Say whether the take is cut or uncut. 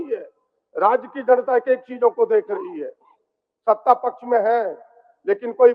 uncut